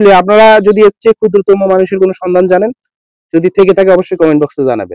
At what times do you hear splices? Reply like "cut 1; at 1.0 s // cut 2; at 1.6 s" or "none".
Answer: none